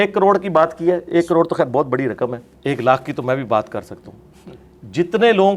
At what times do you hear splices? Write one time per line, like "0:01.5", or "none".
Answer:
0:02.5